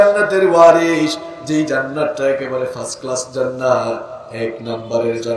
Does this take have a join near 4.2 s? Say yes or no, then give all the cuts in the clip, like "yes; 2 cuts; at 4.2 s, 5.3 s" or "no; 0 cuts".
no; 0 cuts